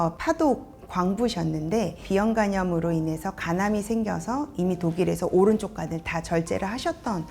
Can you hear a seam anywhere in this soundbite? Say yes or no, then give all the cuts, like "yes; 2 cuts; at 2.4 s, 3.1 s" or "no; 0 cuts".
yes; 1 cut; at 2.0 s